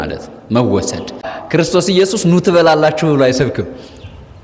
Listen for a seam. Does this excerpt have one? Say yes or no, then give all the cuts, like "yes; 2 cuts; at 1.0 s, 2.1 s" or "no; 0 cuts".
yes; 1 cut; at 1.2 s